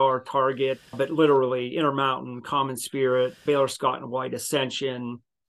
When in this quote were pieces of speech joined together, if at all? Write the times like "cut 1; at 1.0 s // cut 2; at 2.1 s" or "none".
cut 1; at 0.8 s // cut 2; at 3.4 s